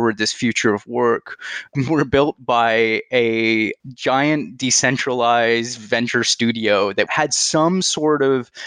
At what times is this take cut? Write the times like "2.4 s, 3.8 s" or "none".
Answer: 1.7 s, 7.1 s